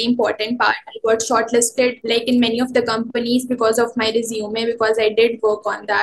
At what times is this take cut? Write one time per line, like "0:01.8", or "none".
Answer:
0:02.0